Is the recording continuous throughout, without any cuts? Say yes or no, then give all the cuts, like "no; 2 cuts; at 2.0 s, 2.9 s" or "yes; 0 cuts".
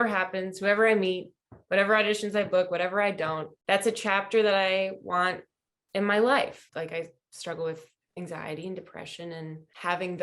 no; 3 cuts; at 3.5 s, 6.5 s, 8.0 s